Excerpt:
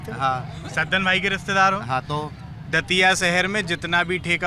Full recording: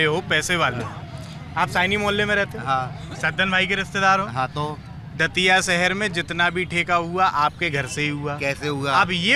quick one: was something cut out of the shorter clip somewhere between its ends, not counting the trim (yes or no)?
no